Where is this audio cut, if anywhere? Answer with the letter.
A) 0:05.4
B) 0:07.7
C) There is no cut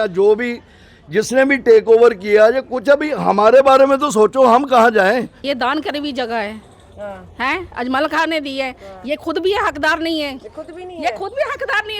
A